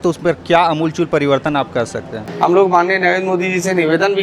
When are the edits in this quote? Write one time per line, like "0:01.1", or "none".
0:02.2